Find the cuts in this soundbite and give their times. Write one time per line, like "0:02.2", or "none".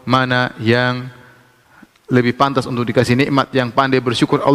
none